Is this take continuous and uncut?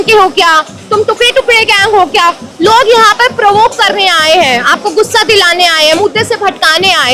yes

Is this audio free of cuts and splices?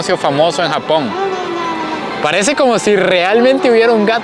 yes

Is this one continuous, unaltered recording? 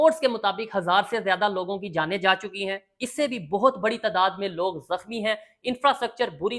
yes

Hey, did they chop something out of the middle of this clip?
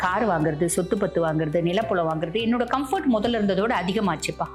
no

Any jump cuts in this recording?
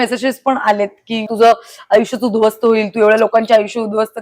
yes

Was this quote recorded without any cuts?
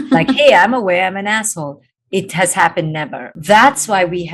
no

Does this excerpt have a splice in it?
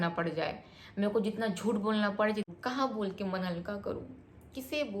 yes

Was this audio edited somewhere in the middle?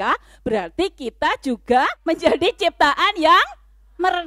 yes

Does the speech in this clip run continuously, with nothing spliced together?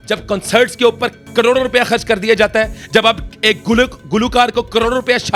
yes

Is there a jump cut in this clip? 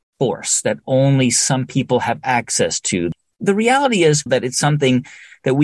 yes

